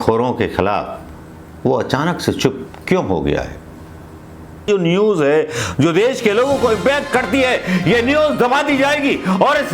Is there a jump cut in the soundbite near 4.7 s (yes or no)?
yes